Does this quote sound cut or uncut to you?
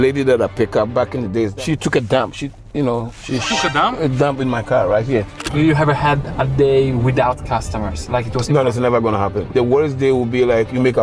cut